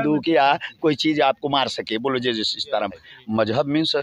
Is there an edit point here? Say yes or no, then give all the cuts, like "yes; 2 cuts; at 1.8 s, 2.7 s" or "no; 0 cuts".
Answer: yes; 1 cut; at 3.0 s